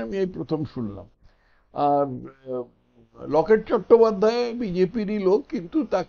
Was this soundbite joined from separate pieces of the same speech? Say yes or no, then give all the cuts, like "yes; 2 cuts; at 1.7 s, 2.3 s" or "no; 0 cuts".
no; 0 cuts